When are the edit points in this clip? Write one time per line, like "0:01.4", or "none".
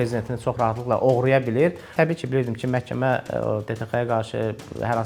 0:01.9